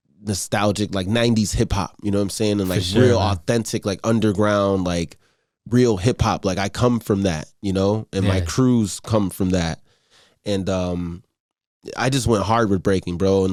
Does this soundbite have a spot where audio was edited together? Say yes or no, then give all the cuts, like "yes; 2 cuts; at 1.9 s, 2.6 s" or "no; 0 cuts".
no; 0 cuts